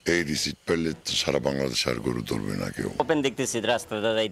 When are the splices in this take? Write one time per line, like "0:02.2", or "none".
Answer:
0:03.0

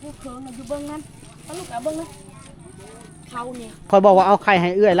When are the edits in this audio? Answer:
0:03.7

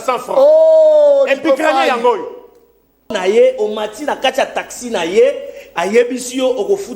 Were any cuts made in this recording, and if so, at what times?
0:03.1

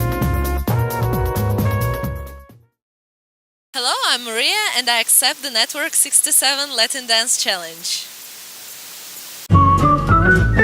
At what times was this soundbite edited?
0:03.4

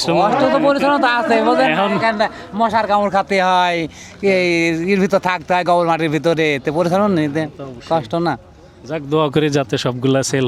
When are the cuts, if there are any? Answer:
none

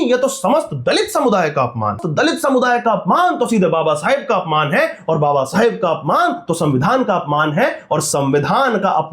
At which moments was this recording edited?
0:02.0

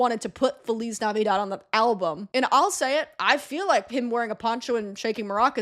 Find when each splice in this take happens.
0:02.2

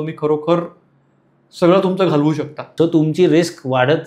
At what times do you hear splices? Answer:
0:02.6

